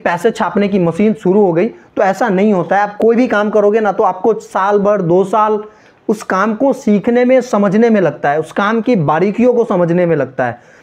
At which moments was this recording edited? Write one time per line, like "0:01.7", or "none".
none